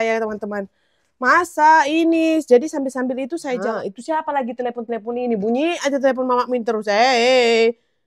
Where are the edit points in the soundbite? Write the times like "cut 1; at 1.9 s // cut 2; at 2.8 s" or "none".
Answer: cut 1; at 3.6 s